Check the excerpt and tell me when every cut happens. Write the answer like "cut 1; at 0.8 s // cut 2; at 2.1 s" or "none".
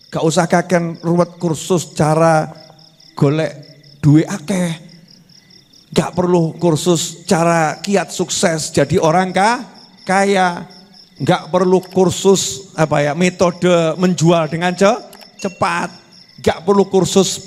none